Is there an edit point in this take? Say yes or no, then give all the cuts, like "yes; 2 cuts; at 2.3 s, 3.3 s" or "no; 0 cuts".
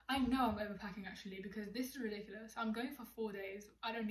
no; 0 cuts